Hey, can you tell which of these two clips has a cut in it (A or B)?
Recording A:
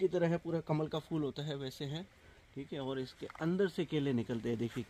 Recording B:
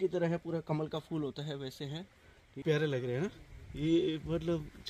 B